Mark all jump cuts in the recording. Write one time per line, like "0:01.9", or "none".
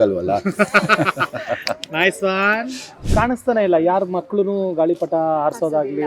0:03.0